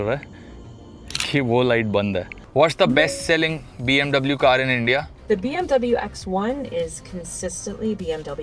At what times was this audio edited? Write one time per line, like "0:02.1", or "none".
0:02.4
0:05.1